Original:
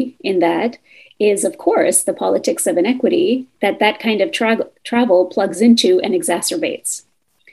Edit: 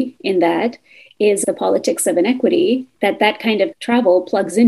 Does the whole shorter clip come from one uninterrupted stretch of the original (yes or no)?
no